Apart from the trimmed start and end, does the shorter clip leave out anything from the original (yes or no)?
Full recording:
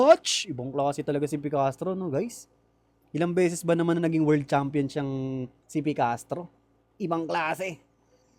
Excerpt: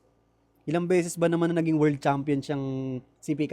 no